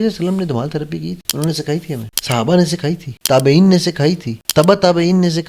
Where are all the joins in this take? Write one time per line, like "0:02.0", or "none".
0:01.2
0:02.1
0:03.1
0:04.3